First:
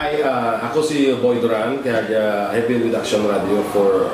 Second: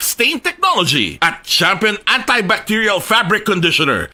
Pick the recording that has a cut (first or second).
first